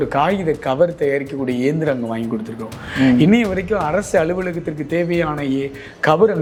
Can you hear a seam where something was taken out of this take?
no; 0 cuts

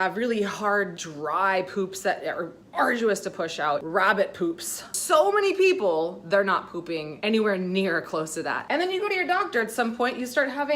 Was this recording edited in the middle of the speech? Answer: yes; 2 cuts; at 3.8 s, 4.9 s

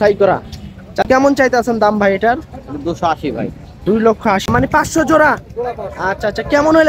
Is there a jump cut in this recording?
yes; 2 cuts; at 1.0 s, 4.5 s

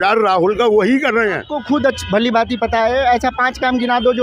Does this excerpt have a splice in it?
yes; 1 cut; at 1.5 s

